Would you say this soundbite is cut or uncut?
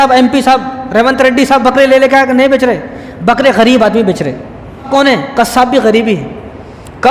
cut